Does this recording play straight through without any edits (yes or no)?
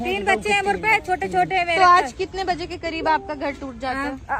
yes